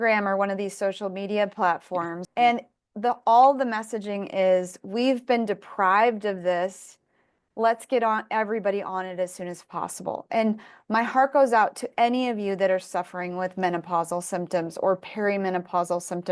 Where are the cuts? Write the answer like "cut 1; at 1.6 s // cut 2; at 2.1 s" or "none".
cut 1; at 2.2 s